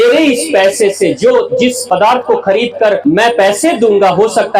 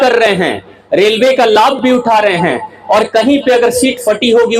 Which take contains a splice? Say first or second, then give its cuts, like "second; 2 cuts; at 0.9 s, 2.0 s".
first; 2 cuts; at 1.8 s, 3.0 s